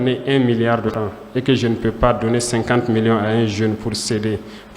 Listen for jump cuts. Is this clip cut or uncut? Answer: cut